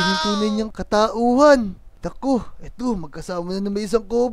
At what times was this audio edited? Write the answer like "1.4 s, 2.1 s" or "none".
1.9 s

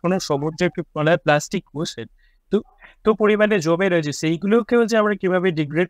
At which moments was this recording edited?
none

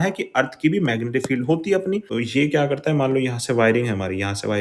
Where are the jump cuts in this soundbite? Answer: 2.1 s

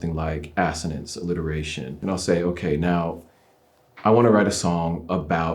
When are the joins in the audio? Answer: 1.9 s

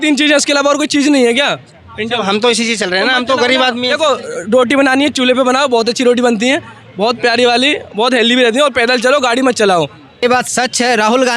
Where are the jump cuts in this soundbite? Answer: 10.2 s

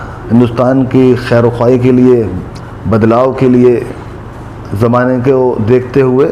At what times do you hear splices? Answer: none

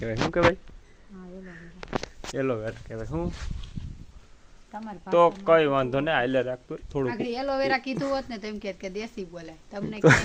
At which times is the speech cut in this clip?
none

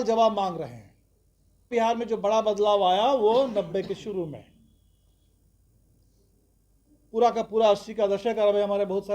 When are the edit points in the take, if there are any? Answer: 1.7 s

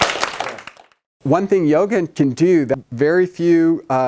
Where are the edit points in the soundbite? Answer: 1.1 s, 2.1 s, 2.8 s

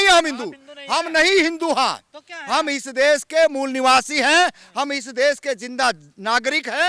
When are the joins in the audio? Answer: none

